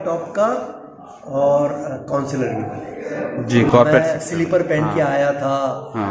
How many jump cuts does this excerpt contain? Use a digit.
1